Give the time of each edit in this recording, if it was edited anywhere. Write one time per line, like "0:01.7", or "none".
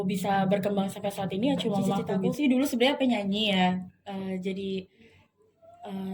0:02.3